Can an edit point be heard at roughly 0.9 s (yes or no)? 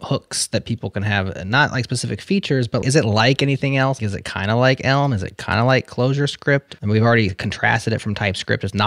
no